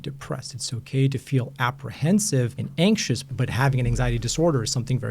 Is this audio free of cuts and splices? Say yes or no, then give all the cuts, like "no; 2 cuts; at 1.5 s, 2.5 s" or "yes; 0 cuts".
no; 2 cuts; at 2.6 s, 3.3 s